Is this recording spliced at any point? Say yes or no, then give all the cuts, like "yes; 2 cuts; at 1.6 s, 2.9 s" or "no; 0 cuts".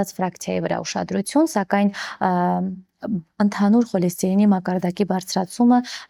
no; 0 cuts